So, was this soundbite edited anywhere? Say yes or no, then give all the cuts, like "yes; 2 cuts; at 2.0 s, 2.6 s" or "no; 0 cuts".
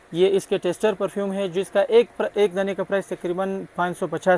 no; 0 cuts